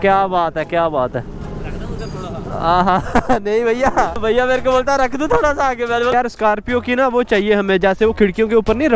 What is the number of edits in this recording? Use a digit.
0